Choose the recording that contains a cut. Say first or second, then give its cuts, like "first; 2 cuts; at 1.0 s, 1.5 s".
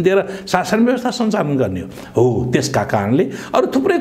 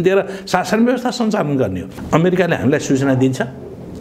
second; 1 cut; at 1.9 s